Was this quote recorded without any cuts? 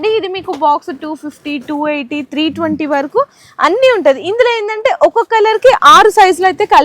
yes; 0 cuts

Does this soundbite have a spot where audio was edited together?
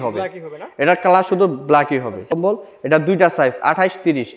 yes; 1 cut; at 2.3 s

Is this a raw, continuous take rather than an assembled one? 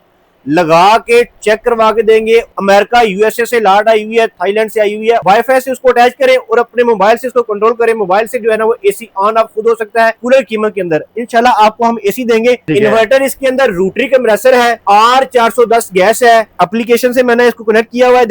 no; 5 cuts; at 2.5 s, 5.2 s, 10.2 s, 12.6 s, 16.5 s

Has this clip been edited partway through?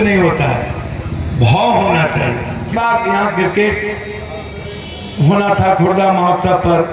yes; 1 cut; at 2.7 s

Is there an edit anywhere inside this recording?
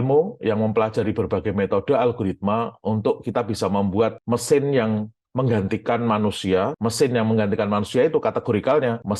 no; 0 cuts

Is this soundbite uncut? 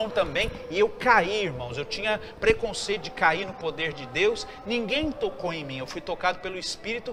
yes; 0 cuts

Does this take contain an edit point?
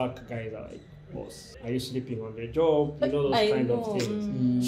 yes; 1 cut; at 1.4 s

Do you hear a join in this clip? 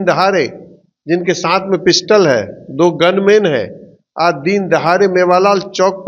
no; 0 cuts

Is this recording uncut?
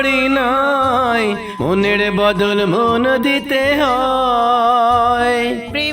no; 1 cut; at 1.5 s

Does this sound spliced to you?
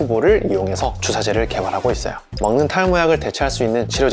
yes; 1 cut; at 2.4 s

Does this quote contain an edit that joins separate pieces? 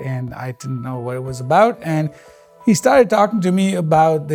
no; 0 cuts

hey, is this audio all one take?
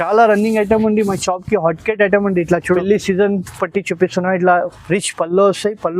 no; 1 cut; at 2.7 s

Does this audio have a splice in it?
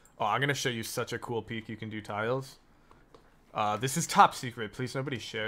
no; 0 cuts

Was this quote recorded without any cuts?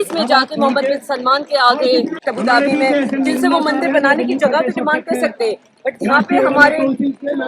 no; 1 cut; at 2.2 s

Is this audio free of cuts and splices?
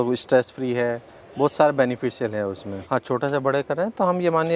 no; 1 cut; at 2.8 s

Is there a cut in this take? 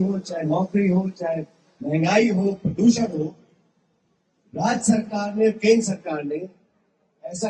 no; 0 cuts

